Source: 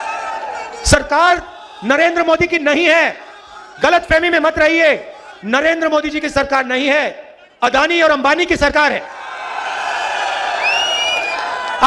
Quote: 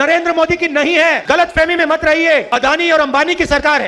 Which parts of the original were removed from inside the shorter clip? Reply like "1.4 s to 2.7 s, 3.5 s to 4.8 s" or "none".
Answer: 3.1 s to 3.7 s, 5.0 s to 7.6 s